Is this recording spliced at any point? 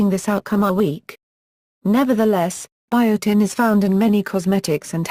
yes; 1 cut; at 3.2 s

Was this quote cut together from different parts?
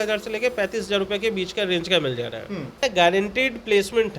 yes; 1 cut; at 2.8 s

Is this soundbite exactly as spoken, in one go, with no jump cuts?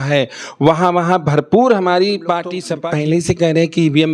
no; 1 cut; at 2.7 s

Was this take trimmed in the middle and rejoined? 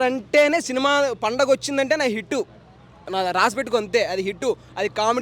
no; 0 cuts

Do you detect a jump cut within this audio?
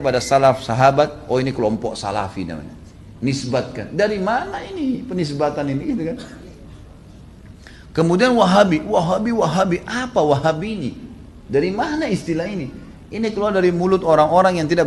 no; 0 cuts

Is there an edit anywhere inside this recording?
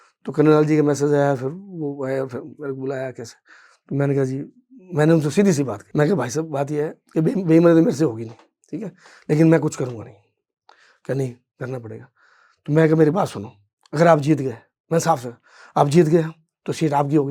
no; 0 cuts

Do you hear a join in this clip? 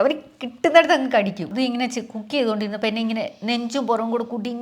yes; 1 cut; at 1.5 s

